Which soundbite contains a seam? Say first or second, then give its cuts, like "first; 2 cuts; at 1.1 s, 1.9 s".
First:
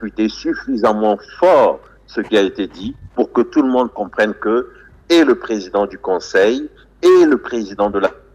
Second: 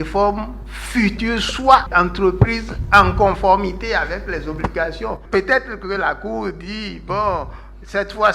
second; 2 cuts; at 1.2 s, 1.9 s